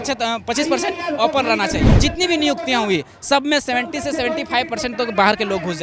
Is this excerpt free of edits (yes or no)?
no